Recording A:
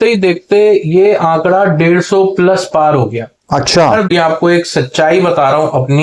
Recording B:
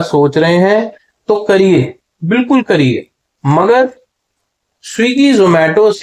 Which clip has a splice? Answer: A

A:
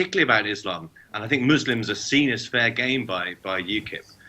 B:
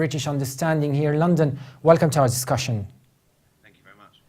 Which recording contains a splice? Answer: A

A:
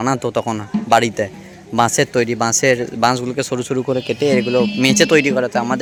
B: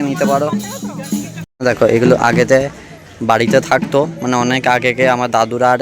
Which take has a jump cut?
B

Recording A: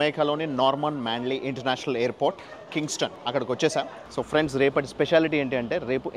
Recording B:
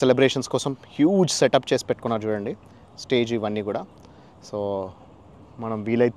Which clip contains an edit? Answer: A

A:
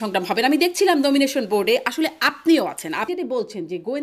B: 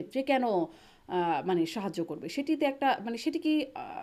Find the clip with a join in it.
A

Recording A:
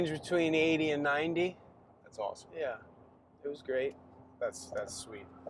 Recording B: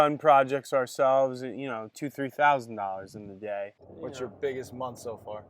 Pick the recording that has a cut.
B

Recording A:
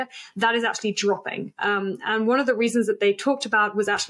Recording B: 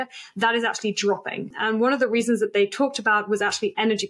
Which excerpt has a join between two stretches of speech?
B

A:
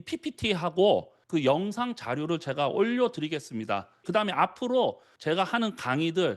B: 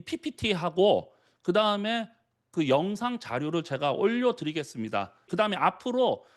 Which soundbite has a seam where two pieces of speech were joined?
A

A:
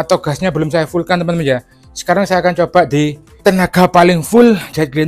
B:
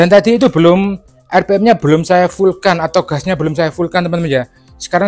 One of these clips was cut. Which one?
A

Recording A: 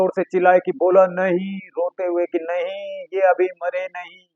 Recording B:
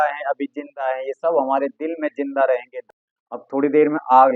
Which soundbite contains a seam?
B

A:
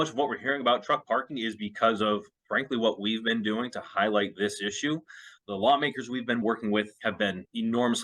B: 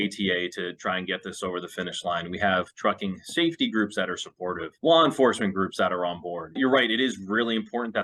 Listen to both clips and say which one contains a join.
A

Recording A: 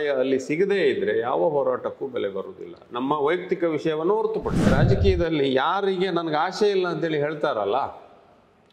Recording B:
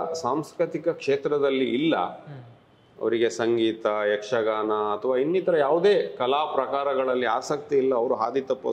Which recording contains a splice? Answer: A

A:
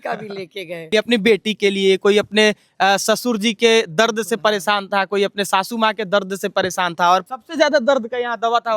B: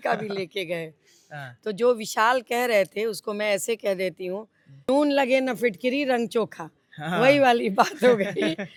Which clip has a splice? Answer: A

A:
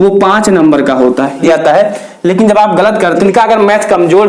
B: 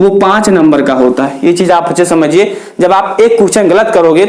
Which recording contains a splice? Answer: A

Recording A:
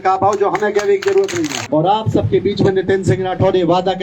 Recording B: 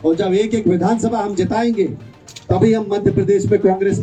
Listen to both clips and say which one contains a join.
A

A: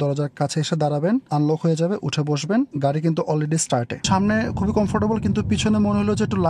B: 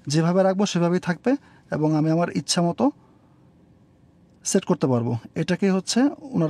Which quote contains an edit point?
A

